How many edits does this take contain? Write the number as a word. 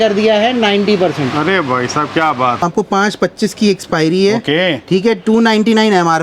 one